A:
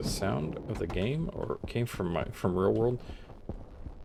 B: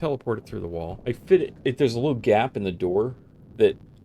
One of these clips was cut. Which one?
B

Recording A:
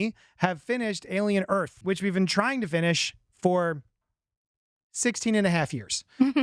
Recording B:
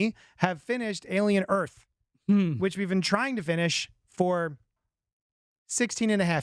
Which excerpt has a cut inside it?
A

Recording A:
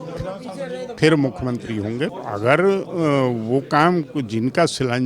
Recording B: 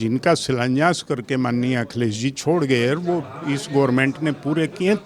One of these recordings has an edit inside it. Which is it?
A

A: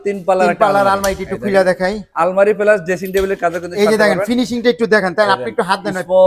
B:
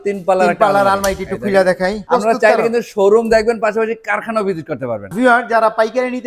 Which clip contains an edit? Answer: B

